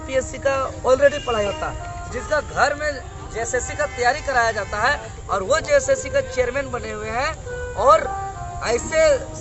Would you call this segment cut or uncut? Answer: uncut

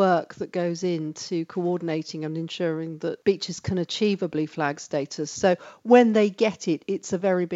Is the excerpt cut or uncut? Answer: cut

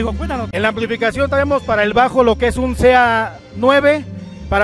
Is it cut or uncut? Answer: uncut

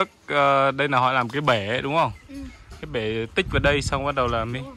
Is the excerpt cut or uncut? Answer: uncut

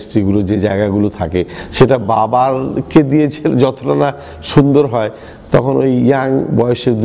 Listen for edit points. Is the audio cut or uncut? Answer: uncut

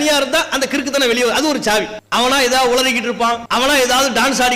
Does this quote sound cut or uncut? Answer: cut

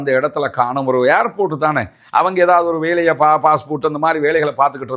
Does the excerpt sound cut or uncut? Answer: uncut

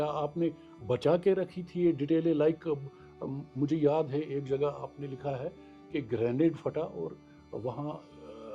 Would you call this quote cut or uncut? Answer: uncut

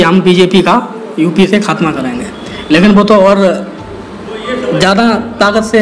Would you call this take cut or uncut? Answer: uncut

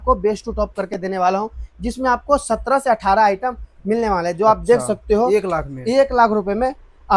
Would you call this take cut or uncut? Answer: uncut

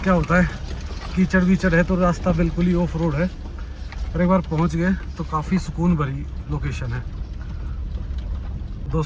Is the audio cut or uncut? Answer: uncut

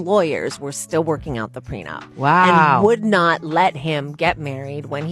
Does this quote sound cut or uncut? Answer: uncut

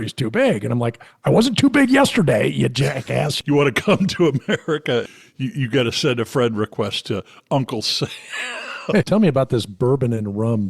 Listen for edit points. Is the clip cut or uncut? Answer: cut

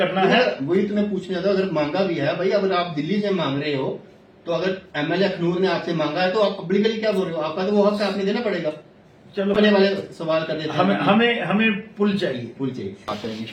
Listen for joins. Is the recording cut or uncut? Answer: uncut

